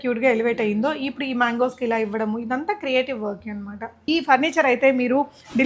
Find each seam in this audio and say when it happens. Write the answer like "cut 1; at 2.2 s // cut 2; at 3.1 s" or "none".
cut 1; at 4.0 s